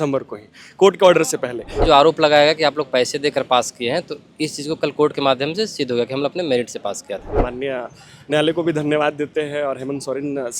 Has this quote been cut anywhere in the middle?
yes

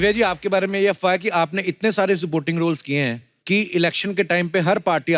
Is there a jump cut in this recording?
yes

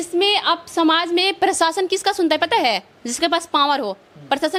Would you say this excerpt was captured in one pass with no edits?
yes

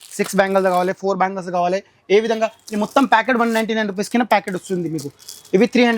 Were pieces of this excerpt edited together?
no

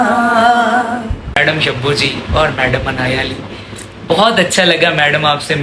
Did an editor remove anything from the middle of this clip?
yes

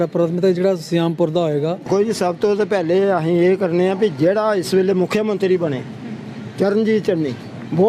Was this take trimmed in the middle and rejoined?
yes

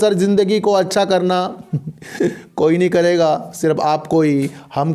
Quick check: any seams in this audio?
no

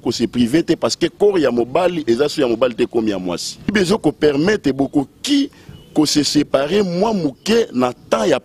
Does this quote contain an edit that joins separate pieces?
yes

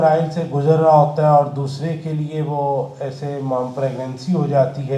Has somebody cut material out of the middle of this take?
no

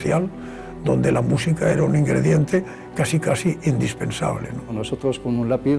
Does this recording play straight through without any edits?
no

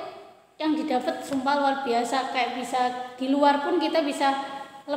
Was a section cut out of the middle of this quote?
no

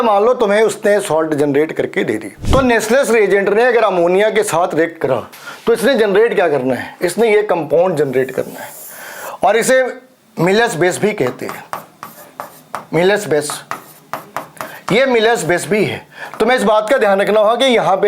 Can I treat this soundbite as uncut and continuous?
no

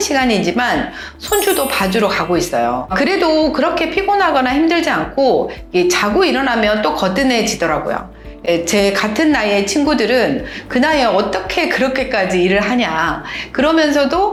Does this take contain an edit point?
no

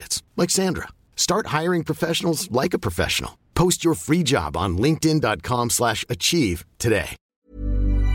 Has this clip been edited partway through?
yes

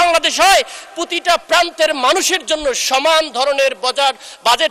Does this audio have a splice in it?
no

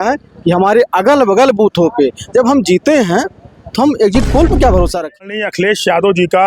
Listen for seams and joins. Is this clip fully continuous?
no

